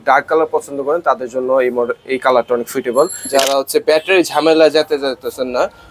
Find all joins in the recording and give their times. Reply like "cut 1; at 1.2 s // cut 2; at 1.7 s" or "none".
cut 1; at 3.3 s